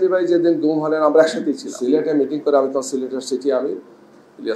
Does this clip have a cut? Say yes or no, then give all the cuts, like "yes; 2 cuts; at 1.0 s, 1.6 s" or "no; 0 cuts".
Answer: yes; 1 cut; at 1.7 s